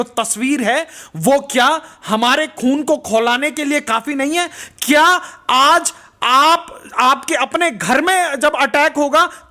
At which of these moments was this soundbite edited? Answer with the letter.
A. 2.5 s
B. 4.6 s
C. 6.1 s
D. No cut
D